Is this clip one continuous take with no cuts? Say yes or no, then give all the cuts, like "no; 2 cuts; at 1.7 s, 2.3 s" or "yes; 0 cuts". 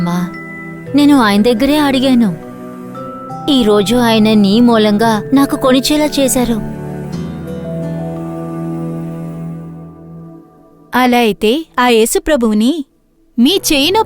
yes; 0 cuts